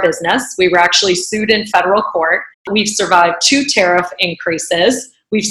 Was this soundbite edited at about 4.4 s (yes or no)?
no